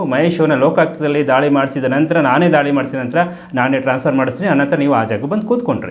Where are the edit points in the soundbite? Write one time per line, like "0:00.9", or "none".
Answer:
none

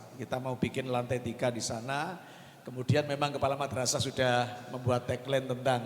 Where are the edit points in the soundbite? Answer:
none

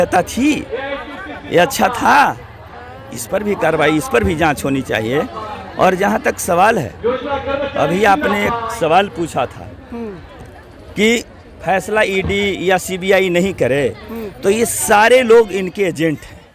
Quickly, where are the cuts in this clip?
none

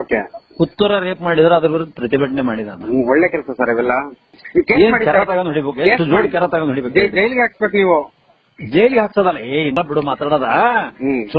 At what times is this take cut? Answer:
0:04.4
0:09.8

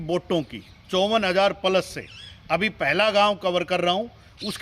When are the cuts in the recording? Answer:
none

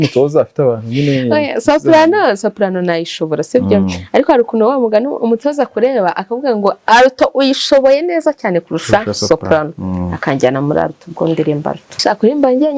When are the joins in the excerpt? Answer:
0:11.9

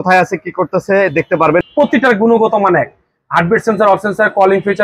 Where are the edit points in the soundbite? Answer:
0:01.7

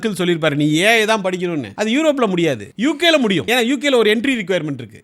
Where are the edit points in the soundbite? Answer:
0:01.7
0:02.7
0:03.4

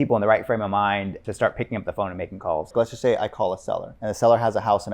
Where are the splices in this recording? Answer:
0:01.2
0:02.7
0:03.9

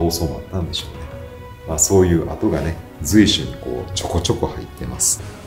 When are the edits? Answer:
none

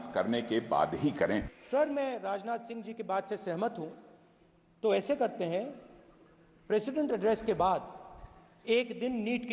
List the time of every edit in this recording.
0:01.6

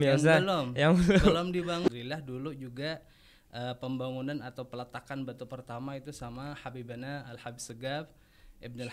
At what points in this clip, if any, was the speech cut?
0:01.9

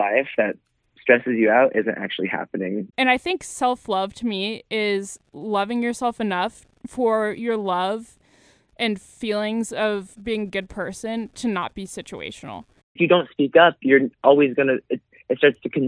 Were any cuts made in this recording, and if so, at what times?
0:02.9
0:13.0

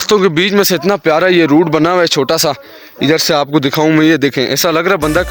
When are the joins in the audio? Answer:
none

